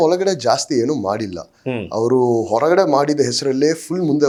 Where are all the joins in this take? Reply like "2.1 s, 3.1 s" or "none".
none